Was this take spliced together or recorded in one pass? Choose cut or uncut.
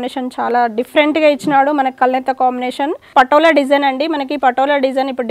cut